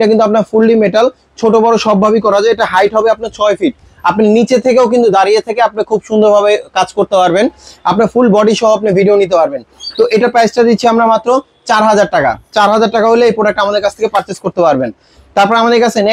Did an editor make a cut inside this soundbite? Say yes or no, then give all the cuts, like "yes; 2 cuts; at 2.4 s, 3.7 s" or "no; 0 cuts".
no; 0 cuts